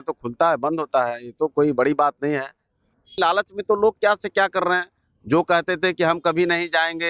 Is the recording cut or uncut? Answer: cut